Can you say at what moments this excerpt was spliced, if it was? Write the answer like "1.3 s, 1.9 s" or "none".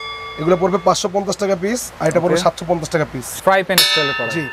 3.3 s